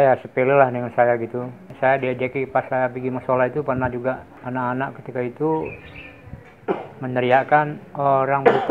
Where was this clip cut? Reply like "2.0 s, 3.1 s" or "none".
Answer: 1.7 s, 4.3 s